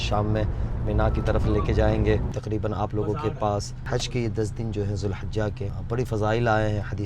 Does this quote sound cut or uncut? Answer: cut